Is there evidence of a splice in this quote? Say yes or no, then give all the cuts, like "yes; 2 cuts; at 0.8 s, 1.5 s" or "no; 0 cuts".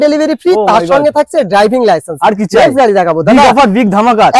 no; 0 cuts